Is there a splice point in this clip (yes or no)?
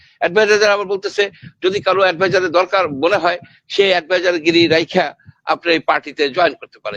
no